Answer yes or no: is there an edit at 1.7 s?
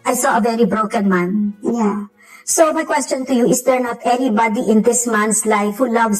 yes